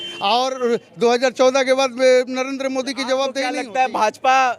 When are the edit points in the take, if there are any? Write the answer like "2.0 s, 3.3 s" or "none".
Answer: 3.5 s